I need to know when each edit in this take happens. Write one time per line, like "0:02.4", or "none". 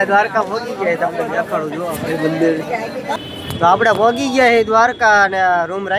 0:03.2